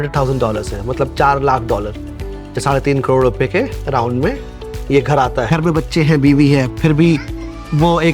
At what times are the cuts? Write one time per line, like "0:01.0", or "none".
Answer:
0:05.5